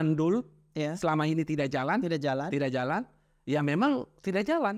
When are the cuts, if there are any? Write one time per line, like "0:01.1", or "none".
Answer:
none